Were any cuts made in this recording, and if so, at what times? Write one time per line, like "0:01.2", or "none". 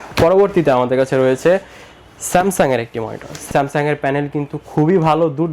none